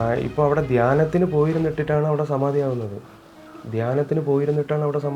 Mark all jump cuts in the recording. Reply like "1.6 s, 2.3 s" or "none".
none